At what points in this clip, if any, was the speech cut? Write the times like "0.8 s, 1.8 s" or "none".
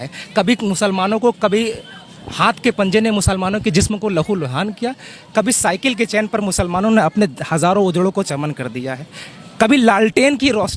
none